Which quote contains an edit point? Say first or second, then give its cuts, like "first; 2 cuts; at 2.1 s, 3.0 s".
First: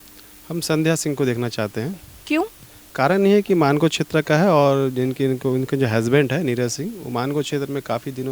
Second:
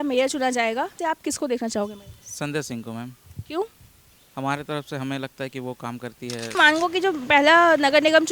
second; 1 cut; at 6.6 s